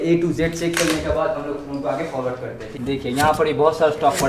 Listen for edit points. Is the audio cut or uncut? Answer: cut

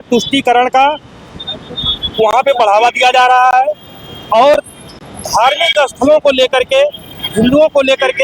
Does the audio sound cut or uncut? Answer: uncut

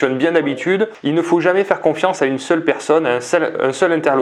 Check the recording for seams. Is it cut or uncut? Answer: uncut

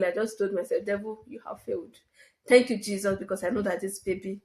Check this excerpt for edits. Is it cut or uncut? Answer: uncut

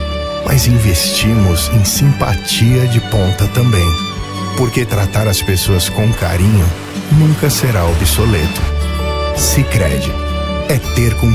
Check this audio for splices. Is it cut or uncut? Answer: uncut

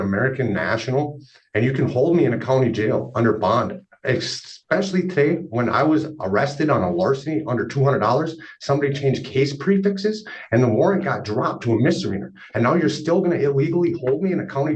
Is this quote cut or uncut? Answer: uncut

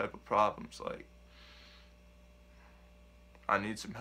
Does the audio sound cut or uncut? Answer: uncut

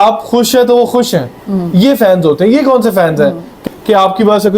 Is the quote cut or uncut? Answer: cut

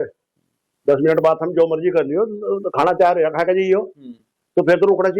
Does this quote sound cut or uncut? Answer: uncut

